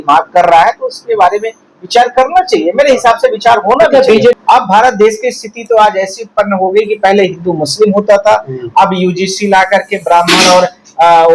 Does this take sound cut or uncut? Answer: cut